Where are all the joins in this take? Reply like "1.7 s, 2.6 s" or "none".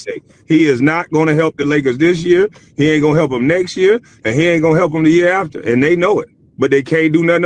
6.4 s